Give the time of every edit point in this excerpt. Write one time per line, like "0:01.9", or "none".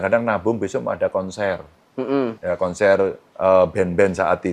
0:02.4
0:03.2

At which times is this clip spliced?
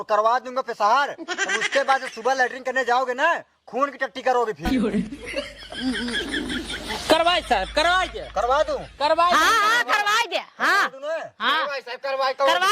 0:04.6
0:05.5

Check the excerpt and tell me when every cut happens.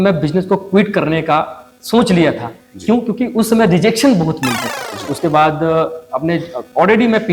0:05.1

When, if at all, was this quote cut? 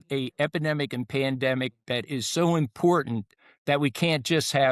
none

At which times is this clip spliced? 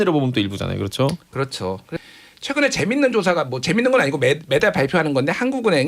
0:02.0

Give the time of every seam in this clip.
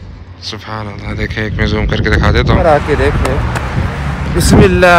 0:02.6

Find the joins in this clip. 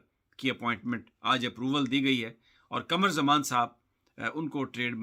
none

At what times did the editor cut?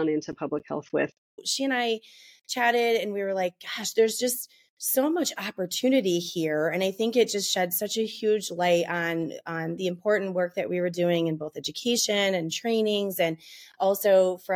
0:01.4

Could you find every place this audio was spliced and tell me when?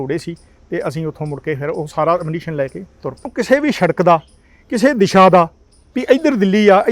0:03.3

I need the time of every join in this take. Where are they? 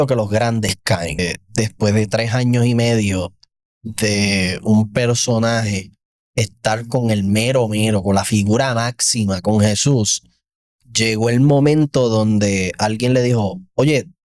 0:01.2

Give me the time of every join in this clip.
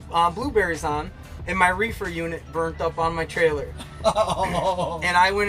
none

